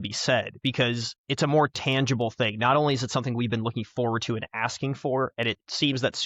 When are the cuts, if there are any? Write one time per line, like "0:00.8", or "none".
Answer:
none